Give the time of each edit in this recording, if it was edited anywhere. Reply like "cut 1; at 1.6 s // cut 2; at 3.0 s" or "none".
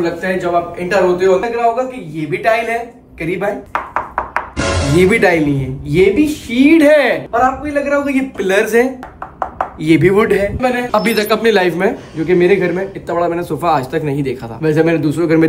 cut 1; at 1.4 s // cut 2; at 10.6 s